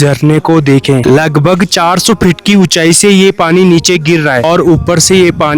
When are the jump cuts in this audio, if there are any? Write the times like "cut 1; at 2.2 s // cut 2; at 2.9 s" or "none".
cut 1; at 4.4 s